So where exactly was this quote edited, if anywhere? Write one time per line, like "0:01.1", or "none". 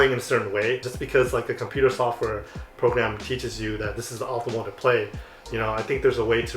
0:00.9